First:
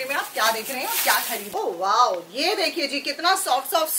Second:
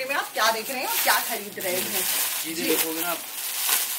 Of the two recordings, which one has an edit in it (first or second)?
first